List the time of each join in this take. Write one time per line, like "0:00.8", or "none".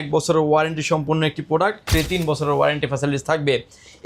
0:01.9